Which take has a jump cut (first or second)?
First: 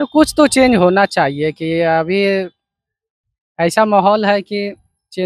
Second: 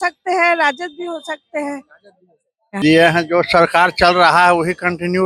second